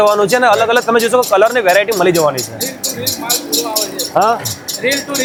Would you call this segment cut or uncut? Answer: uncut